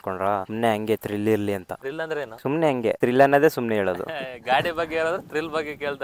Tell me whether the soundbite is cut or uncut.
uncut